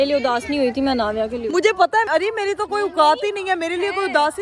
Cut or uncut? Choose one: cut